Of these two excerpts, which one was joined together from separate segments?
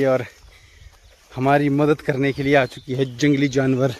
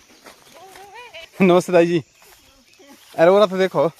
second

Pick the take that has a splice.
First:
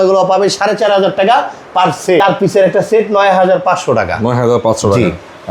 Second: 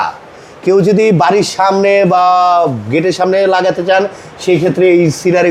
first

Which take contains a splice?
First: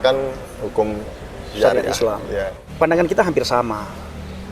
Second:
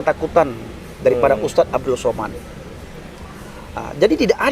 first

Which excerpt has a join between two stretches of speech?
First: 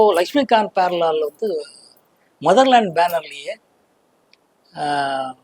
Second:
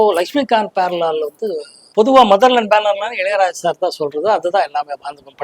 second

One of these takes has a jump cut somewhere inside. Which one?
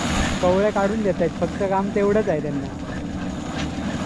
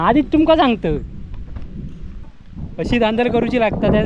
second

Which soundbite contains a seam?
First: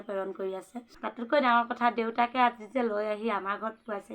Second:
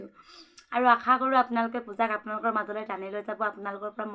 first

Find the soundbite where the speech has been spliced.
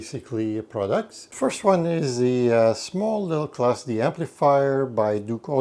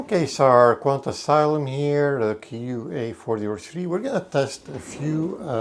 first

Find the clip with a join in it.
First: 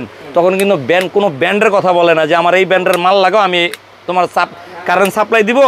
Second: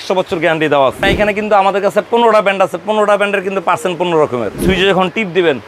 second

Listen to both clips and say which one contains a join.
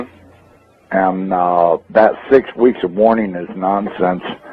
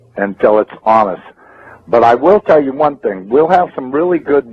first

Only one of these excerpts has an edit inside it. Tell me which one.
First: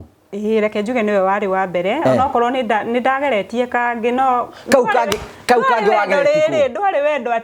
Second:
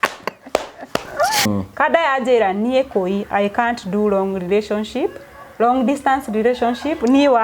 second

